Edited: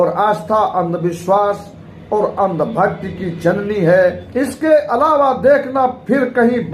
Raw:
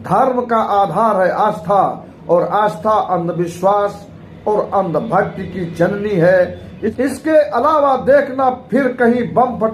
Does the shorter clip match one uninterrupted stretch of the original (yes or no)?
no